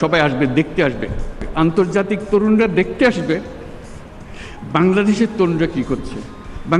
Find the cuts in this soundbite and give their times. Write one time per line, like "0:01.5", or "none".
0:01.6